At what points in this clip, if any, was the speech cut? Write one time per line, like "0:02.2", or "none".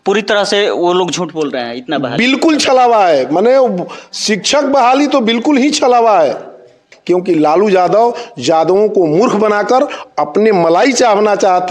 0:06.9